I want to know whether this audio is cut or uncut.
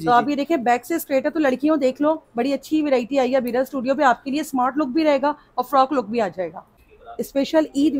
cut